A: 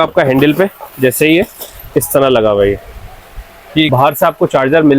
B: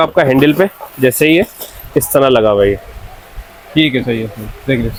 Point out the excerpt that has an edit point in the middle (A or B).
A